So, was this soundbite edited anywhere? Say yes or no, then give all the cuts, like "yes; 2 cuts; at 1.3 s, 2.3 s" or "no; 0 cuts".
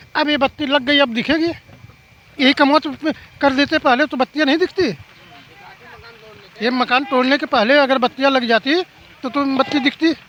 no; 0 cuts